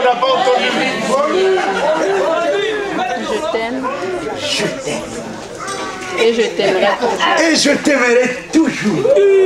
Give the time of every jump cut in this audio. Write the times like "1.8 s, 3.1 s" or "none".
3.1 s